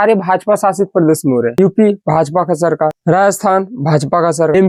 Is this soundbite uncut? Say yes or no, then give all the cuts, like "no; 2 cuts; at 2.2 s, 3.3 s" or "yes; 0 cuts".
yes; 0 cuts